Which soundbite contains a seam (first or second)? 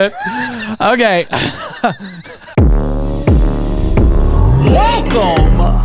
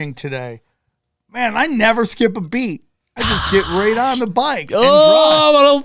first